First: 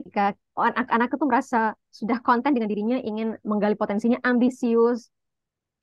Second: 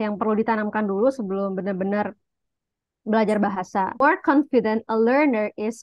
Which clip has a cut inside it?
second; 1 cut; at 3.9 s

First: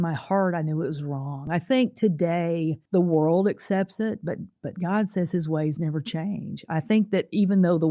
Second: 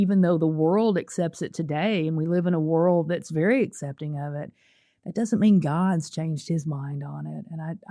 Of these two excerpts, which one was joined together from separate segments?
first; 2 cuts; at 1.4 s, 2.8 s

